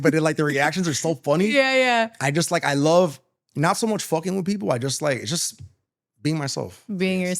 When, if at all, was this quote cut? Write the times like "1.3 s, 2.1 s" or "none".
none